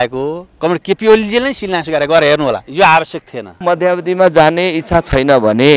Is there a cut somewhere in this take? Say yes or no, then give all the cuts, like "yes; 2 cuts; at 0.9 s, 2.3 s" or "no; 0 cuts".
yes; 2 cuts; at 2.7 s, 3.5 s